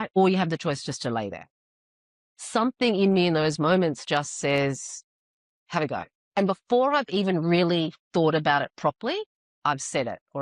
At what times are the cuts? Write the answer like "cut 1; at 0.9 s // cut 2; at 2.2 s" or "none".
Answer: cut 1; at 6.2 s